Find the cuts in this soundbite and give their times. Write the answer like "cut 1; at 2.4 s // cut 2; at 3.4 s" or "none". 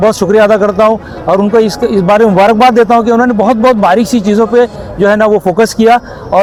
none